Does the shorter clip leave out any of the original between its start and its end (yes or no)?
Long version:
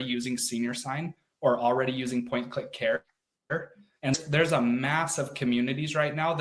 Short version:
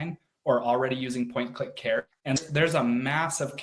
yes